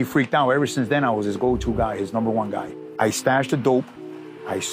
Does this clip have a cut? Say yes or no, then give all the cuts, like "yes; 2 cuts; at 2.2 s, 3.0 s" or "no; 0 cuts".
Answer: yes; 1 cut; at 2.8 s